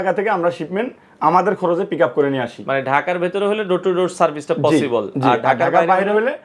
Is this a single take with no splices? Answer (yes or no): yes